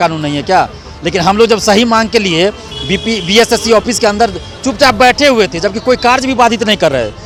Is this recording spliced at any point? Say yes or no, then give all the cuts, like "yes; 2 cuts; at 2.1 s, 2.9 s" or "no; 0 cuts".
no; 0 cuts